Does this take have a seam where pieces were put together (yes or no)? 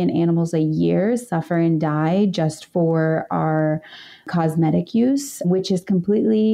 no